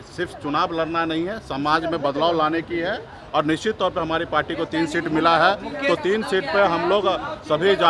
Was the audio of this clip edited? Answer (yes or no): no